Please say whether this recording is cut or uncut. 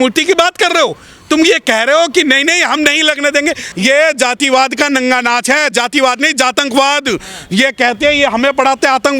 cut